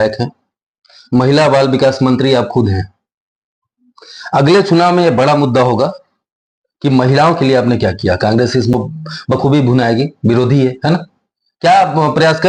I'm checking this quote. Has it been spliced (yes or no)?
no